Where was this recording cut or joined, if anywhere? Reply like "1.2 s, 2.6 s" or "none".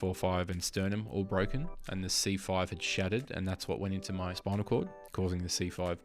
4.3 s